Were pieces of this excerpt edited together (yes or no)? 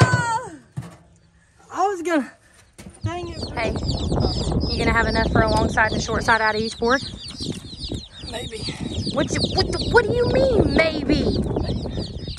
yes